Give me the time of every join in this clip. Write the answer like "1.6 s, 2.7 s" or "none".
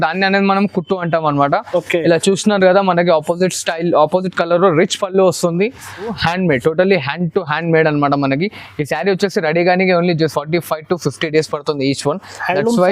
6.2 s